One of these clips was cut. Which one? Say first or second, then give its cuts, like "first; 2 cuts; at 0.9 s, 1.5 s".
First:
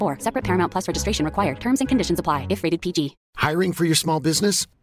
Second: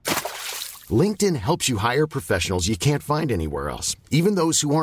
first; 1 cut; at 3.2 s